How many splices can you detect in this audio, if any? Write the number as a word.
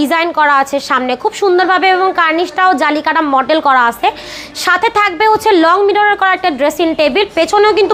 zero